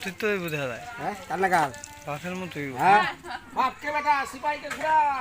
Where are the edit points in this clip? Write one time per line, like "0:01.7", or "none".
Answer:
0:03.0